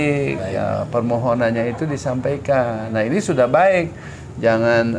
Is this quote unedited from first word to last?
yes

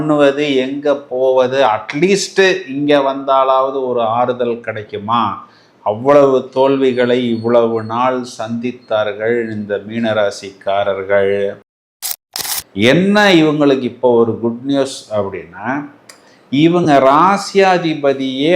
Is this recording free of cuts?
no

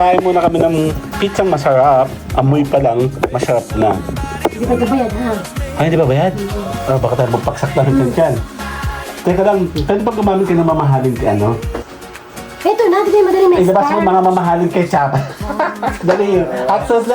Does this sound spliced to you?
no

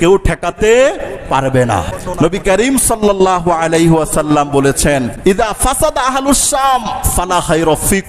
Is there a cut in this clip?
yes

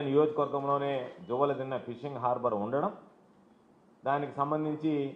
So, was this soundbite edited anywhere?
yes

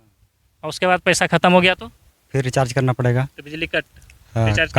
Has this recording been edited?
no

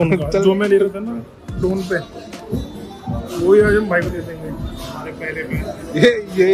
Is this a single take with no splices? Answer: yes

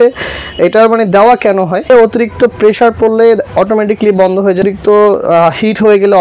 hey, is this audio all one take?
no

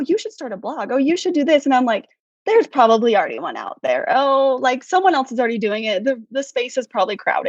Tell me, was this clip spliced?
no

